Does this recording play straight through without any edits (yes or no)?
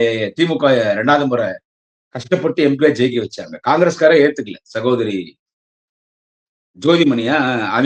yes